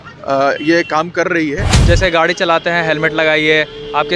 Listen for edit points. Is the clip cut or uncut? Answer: cut